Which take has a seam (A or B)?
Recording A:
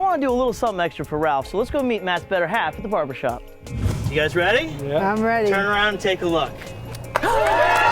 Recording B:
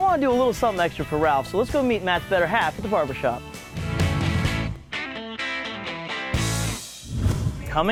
A